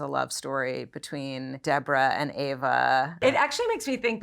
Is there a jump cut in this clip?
yes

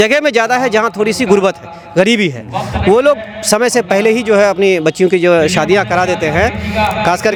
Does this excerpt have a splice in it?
no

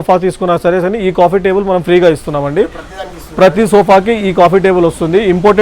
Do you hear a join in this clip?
no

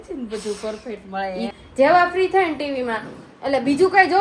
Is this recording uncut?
no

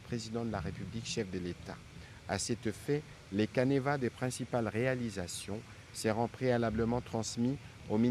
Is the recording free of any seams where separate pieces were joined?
yes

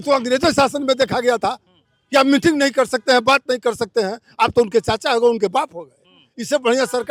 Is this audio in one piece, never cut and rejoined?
yes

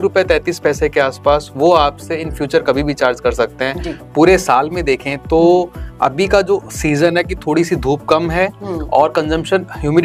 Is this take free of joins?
no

